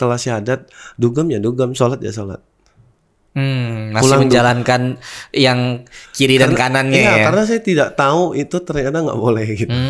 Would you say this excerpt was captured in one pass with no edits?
yes; 0 cuts

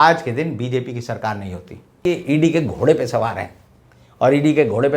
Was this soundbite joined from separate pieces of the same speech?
yes; 1 cut; at 2.0 s

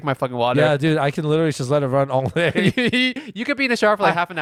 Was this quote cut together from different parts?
no; 0 cuts

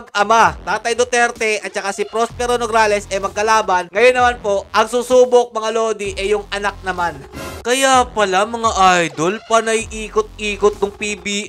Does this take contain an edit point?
yes; 1 cut; at 7.5 s

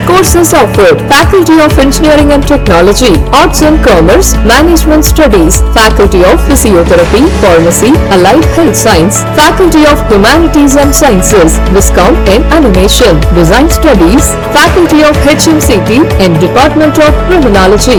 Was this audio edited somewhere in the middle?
no; 0 cuts

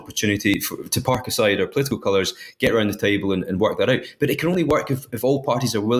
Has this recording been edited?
no; 0 cuts

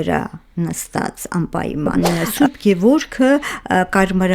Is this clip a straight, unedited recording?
no; 1 cut; at 1.9 s

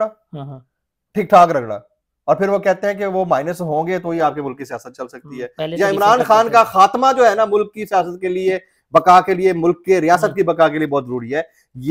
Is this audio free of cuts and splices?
yes; 0 cuts

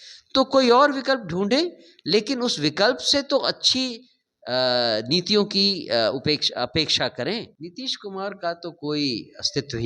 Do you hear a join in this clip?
yes; 1 cut; at 7.5 s

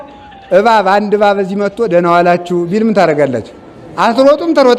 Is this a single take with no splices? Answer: yes; 0 cuts

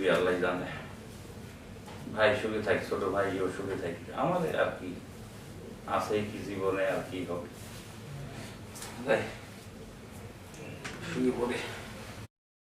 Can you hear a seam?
no; 0 cuts

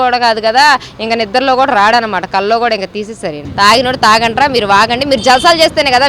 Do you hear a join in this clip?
yes; 1 cut; at 3.4 s

